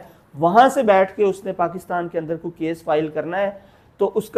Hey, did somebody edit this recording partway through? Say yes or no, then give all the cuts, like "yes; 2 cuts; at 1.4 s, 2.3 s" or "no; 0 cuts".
no; 0 cuts